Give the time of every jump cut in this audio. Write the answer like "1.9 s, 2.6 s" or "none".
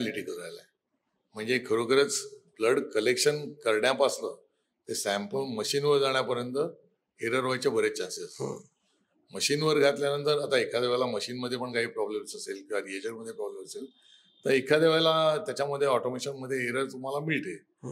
none